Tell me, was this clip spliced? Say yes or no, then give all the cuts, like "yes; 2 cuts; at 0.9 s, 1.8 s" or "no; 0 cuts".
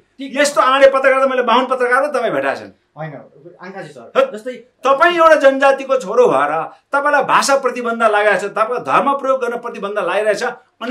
no; 0 cuts